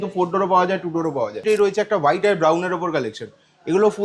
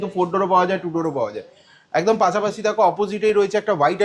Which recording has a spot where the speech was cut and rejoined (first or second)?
first